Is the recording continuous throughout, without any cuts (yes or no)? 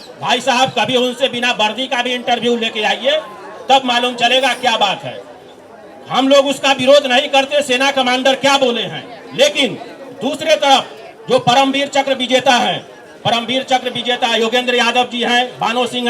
yes